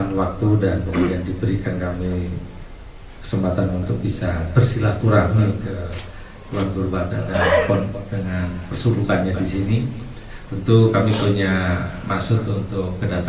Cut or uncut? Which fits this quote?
uncut